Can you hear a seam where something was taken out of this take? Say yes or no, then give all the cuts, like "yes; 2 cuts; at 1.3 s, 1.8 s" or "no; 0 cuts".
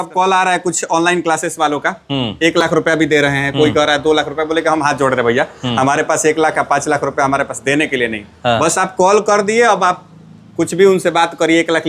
no; 0 cuts